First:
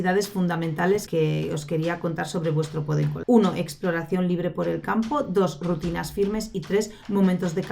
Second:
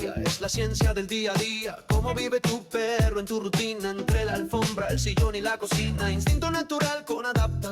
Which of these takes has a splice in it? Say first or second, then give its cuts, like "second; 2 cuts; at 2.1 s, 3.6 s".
first; 2 cuts; at 1.1 s, 3.2 s